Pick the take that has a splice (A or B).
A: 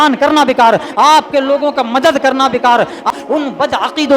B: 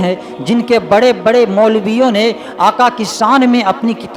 A